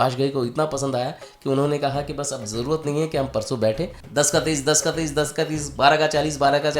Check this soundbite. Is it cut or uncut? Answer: cut